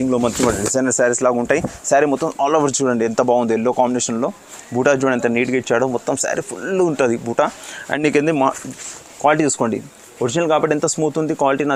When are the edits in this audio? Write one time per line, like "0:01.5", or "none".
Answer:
none